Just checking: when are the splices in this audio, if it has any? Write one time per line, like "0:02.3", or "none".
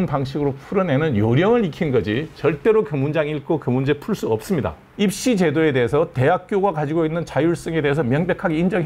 0:04.8

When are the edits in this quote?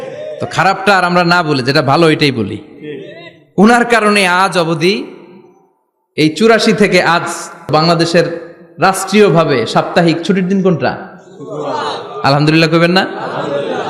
0:07.7

